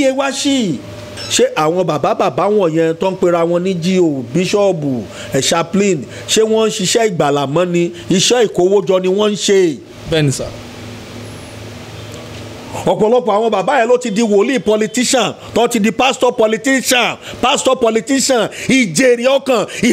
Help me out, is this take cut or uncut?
cut